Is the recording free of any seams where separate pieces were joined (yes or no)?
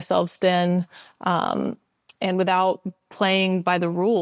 yes